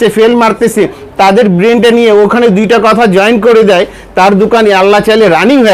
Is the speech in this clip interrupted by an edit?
no; 0 cuts

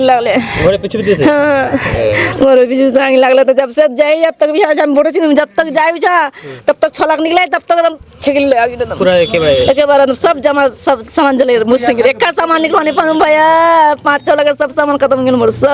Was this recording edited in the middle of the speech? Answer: no; 0 cuts

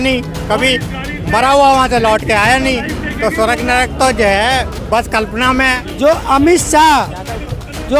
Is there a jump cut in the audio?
yes; 1 cut; at 5.8 s

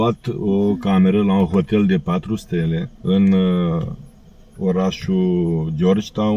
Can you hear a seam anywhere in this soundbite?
no; 0 cuts

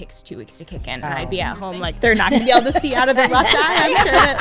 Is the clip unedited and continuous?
no; 1 cut; at 1.9 s

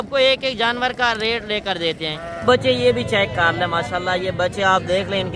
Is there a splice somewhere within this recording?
yes; 1 cut; at 2.3 s

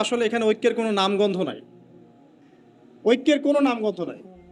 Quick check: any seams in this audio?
no; 0 cuts

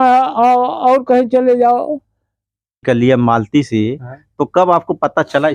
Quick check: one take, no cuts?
no; 1 cut; at 2.8 s

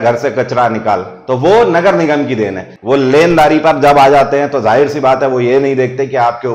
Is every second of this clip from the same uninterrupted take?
no; 1 cut; at 2.7 s

